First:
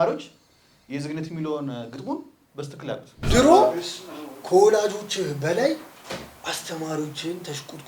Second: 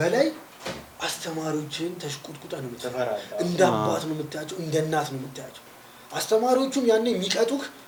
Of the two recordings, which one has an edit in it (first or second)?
first